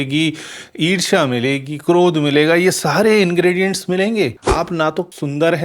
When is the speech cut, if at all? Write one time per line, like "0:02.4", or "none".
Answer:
0:04.4